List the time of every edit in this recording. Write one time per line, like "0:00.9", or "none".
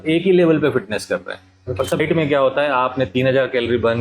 0:02.0